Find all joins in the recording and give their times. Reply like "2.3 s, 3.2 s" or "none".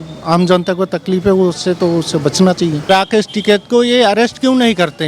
2.9 s